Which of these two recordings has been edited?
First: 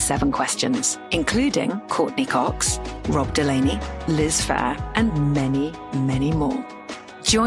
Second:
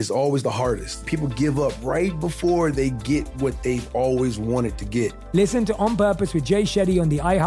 second; 2 cuts; at 1.0 s, 5.2 s

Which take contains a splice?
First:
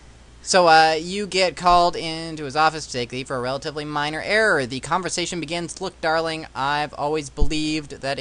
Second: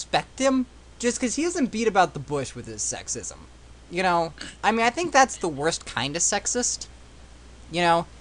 first; 1 cut; at 4.2 s

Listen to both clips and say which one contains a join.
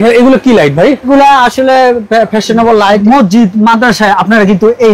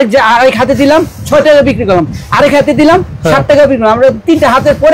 first; 2 cuts; at 1.1 s, 3.0 s

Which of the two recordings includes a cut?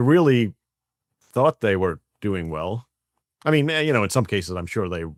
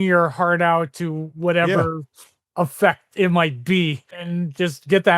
second; 1 cut; at 4.2 s

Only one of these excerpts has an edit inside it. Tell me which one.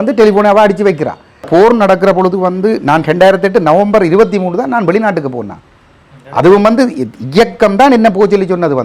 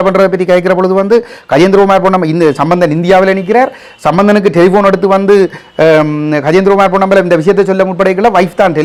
first; 1 cut; at 1.5 s

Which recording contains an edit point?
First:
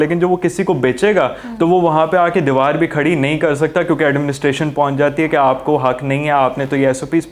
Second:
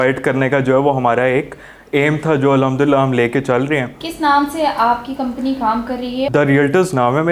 second; 1 cut; at 6.3 s

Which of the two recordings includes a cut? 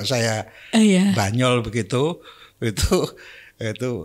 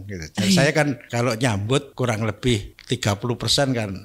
second; 3 cuts; at 1.1 s, 1.9 s, 2.7 s

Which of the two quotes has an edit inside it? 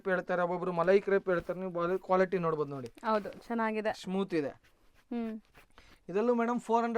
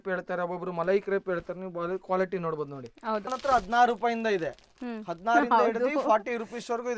second; 1 cut; at 3.3 s

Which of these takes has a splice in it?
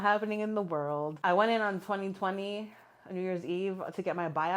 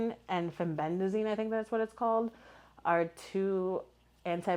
first; 1 cut; at 1.1 s

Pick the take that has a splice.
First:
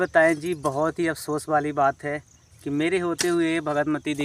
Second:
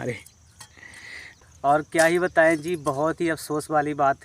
second; 1 cut; at 1.2 s

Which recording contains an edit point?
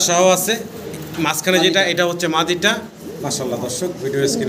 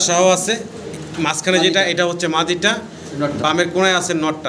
first; 1 cut; at 3.0 s

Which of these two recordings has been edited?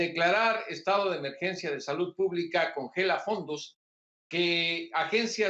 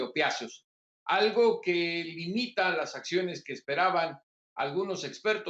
second; 1 cut; at 1.6 s

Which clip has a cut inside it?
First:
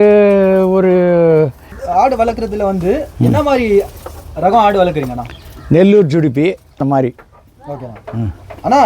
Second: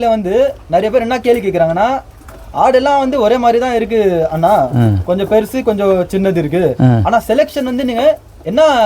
first; 2 cuts; at 1.7 s, 6.8 s

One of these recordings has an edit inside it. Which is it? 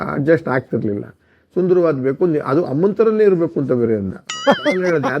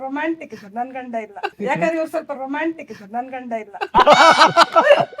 second; 2 cuts; at 1.5 s, 3.9 s

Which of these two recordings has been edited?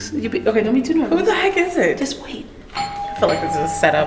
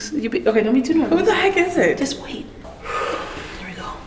second; 1 cut; at 2.6 s

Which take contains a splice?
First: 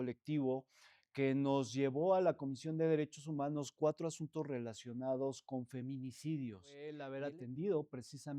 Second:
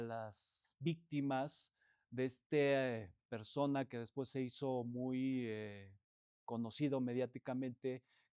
first; 1 cut; at 7.1 s

